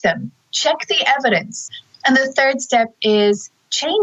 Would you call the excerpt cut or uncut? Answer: cut